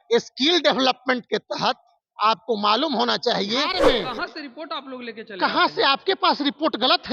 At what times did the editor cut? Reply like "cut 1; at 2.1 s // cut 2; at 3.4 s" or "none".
cut 1; at 3.8 s